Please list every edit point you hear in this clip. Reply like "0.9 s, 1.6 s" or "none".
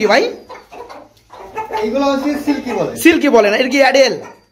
none